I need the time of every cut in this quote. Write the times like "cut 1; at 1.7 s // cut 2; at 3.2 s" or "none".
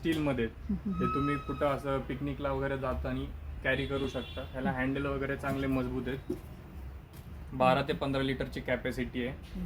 none